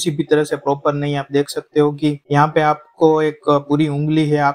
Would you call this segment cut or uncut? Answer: uncut